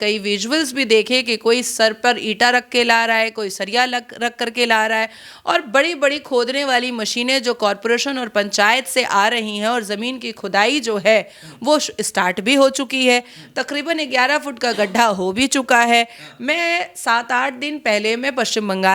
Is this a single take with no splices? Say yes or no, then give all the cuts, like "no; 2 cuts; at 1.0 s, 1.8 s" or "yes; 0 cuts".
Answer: yes; 0 cuts